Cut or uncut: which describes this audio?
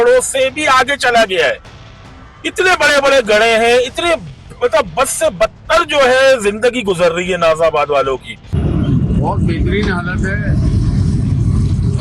cut